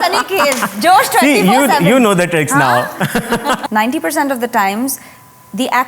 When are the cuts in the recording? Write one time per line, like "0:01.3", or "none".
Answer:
0:03.6